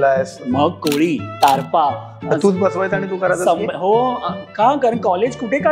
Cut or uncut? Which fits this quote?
cut